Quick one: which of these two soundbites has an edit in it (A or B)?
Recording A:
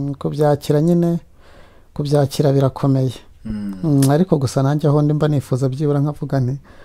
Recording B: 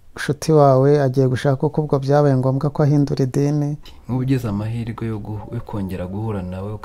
B